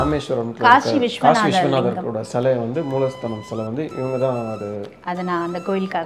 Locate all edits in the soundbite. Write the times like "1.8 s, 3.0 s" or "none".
none